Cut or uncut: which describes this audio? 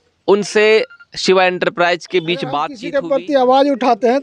cut